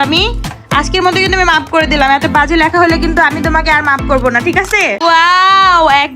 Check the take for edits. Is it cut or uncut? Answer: cut